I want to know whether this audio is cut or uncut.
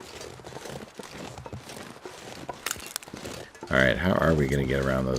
cut